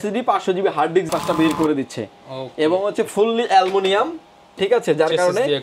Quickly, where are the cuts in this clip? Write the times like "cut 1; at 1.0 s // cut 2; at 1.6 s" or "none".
cut 1; at 1.1 s